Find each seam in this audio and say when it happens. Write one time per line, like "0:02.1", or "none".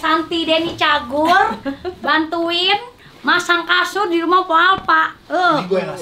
none